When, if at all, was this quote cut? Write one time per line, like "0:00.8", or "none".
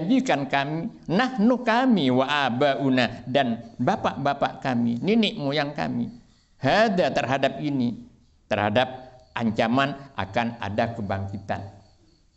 none